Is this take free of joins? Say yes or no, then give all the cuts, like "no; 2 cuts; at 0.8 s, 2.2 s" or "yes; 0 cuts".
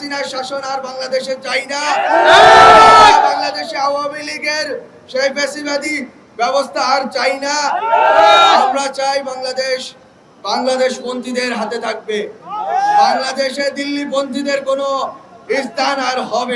yes; 0 cuts